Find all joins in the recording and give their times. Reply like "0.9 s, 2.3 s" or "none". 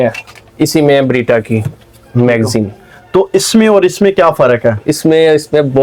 none